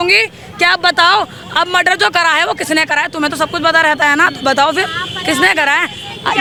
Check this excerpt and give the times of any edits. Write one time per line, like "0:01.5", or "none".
none

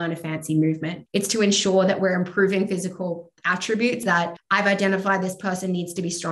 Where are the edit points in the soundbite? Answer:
0:00.9
0:04.0

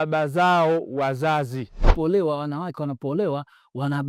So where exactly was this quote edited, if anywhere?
0:01.9

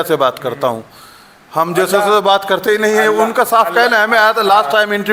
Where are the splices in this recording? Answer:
none

